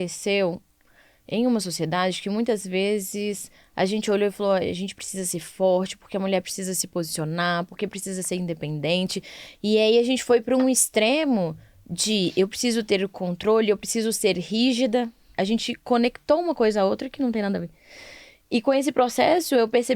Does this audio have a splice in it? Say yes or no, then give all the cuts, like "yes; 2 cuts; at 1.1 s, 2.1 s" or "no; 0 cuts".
yes; 1 cut; at 15.2 s